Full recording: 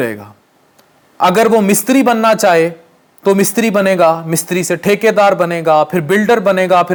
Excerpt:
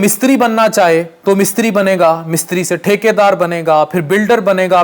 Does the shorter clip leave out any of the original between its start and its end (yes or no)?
yes